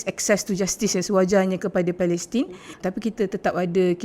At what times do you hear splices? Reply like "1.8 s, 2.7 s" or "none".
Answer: 2.7 s